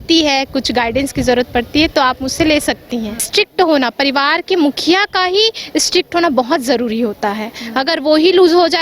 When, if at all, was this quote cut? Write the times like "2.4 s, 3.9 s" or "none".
3.3 s